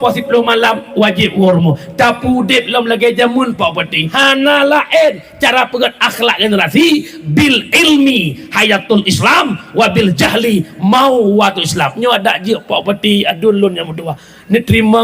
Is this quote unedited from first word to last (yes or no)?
no